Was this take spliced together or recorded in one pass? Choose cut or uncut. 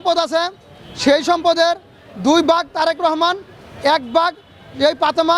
uncut